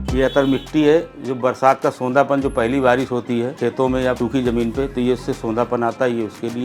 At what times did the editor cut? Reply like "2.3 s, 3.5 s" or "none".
3.8 s